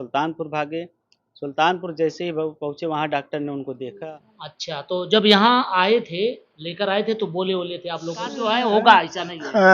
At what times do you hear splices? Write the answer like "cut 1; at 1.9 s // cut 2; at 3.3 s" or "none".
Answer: cut 1; at 4.0 s // cut 2; at 8.4 s